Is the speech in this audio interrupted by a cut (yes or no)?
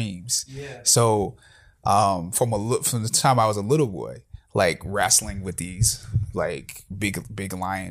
no